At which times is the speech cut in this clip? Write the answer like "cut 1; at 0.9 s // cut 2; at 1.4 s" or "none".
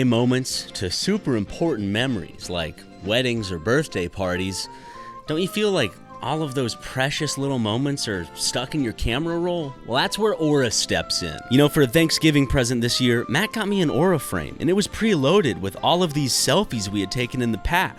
cut 1; at 9.7 s // cut 2; at 11.4 s

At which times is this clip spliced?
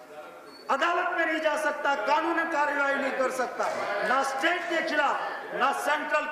none

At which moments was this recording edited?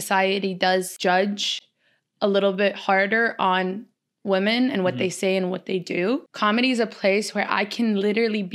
cut 1; at 0.9 s // cut 2; at 6.3 s

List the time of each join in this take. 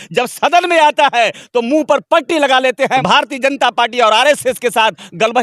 cut 1; at 3.0 s

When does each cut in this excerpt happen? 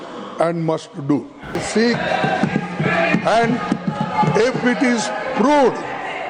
cut 1; at 1.6 s

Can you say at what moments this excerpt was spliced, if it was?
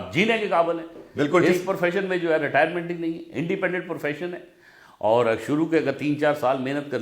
none

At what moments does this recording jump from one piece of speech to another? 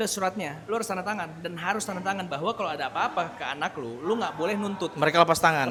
none

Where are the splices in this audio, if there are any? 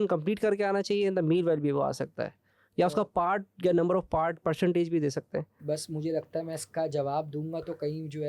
none

